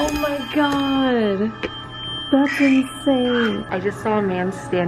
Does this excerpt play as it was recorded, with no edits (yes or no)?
no